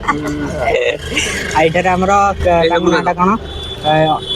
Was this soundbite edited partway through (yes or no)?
no